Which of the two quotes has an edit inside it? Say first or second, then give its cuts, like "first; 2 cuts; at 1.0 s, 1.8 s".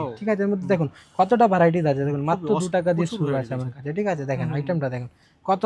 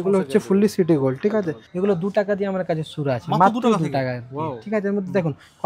second; 1 cut; at 1.7 s